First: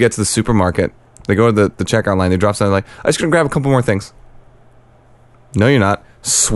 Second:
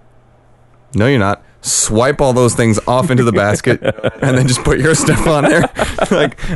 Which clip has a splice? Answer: second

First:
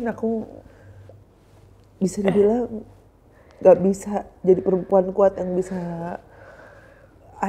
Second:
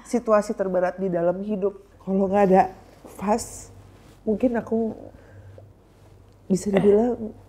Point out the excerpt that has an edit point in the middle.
second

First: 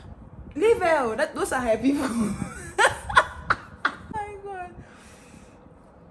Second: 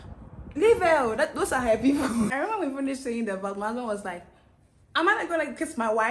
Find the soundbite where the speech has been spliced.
second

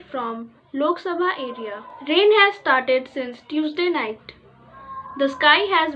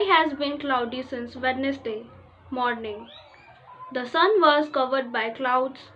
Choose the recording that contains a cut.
first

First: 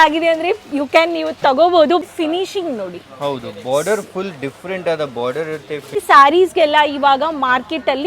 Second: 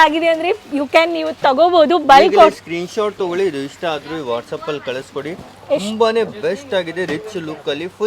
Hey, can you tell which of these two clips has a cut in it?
first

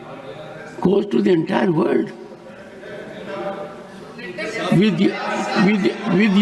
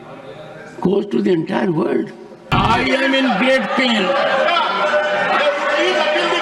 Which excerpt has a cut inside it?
second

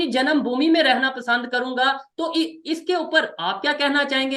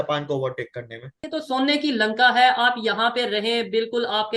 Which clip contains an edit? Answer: second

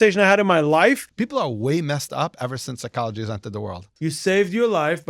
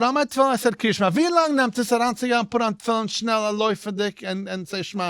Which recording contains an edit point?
first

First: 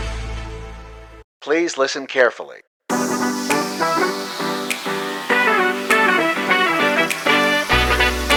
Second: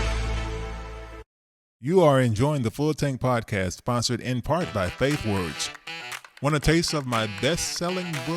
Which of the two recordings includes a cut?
second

